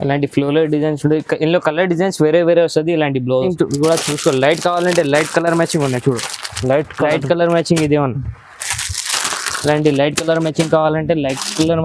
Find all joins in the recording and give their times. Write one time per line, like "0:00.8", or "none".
0:03.5